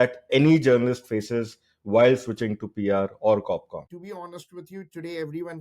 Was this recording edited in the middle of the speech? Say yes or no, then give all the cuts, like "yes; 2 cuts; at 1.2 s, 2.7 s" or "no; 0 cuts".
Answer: yes; 1 cut; at 3.9 s